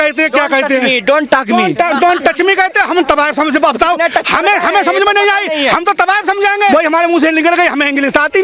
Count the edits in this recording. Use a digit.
1